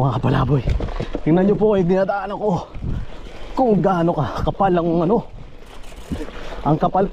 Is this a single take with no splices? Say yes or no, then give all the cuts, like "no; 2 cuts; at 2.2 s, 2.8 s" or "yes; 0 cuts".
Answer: yes; 0 cuts